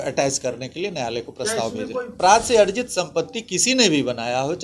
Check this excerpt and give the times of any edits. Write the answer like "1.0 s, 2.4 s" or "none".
2.1 s